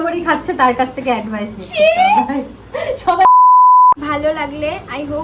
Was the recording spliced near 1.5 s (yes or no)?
no